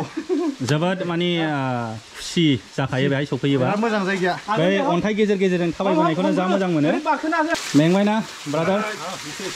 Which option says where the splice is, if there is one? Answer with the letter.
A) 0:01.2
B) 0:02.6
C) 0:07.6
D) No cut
C